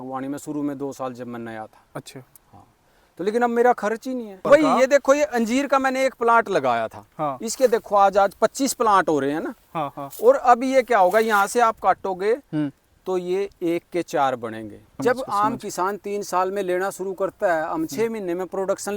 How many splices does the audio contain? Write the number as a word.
two